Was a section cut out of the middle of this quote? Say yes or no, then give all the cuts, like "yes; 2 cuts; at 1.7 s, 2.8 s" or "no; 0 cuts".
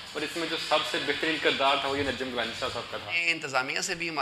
yes; 1 cut; at 3.3 s